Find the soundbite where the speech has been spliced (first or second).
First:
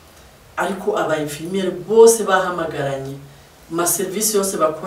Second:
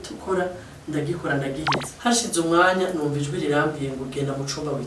second